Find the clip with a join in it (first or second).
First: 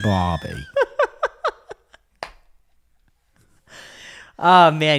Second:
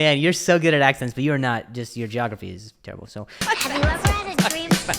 second